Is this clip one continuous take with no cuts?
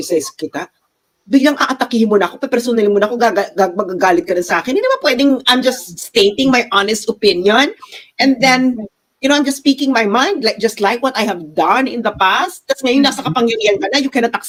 yes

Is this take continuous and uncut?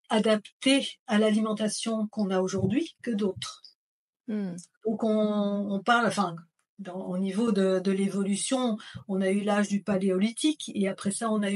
yes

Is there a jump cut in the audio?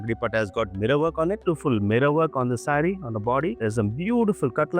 yes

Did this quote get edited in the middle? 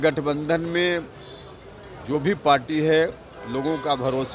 no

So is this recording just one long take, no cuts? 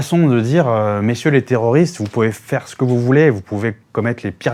yes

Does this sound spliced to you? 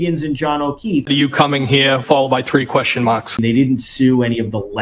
yes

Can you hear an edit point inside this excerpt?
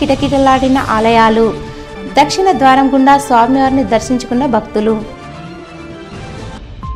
no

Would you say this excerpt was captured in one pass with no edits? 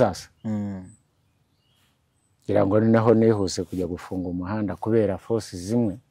yes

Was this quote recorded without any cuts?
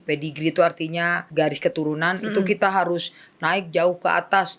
no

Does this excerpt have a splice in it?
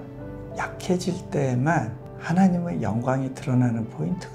no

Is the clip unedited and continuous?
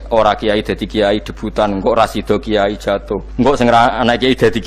no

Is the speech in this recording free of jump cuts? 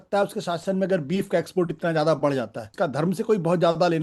no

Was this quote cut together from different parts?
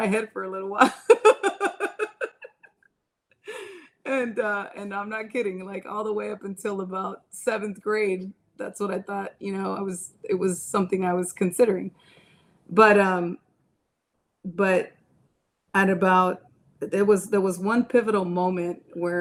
no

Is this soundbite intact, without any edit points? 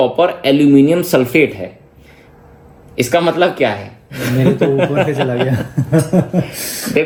yes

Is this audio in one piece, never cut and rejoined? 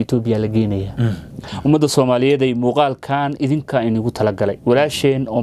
no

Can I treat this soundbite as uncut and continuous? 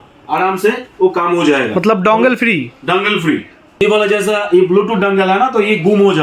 no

